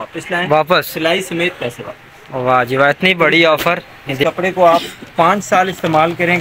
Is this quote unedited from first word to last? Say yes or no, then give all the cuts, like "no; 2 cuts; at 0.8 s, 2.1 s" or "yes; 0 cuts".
no; 1 cut; at 4.2 s